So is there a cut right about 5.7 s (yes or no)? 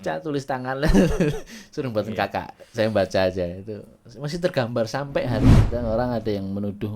yes